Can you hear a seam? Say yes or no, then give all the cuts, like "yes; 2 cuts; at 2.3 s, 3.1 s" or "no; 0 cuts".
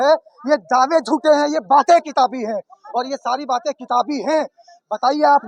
no; 0 cuts